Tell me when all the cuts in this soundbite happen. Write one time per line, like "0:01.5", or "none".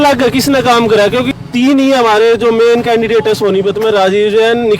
none